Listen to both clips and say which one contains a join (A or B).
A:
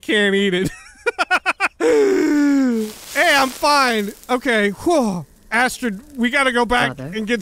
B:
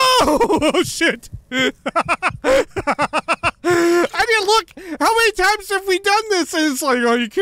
A